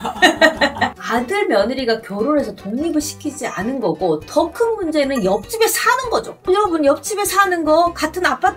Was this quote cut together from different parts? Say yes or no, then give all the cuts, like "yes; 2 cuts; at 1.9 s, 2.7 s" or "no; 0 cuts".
yes; 1 cut; at 1.0 s